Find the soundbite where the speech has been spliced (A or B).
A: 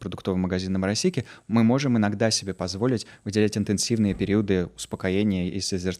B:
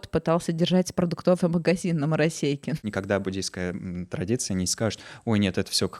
B